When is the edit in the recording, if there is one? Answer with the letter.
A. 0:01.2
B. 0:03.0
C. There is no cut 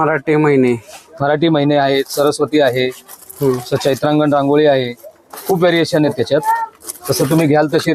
C